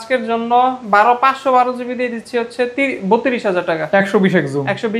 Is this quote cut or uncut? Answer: uncut